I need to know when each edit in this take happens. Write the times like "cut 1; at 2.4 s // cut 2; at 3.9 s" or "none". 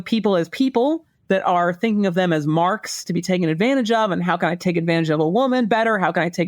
none